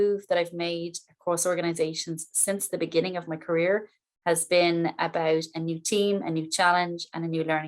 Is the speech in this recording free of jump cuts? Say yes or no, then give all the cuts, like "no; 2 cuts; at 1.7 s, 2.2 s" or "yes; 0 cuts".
yes; 0 cuts